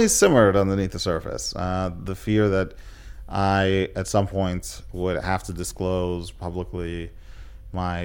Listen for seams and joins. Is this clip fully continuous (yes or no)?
yes